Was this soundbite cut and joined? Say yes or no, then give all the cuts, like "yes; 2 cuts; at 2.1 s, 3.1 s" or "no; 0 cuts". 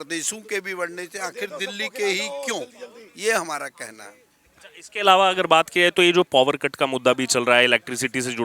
no; 0 cuts